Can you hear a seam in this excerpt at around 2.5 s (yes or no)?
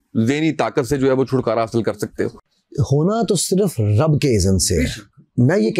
no